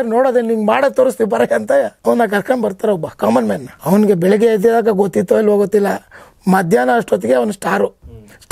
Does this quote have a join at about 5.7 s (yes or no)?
no